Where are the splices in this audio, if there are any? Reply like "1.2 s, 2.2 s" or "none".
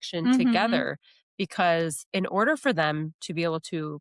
2.0 s